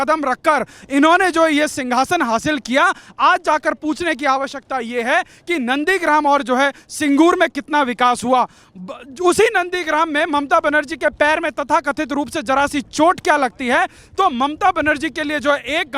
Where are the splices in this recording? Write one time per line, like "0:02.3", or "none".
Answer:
none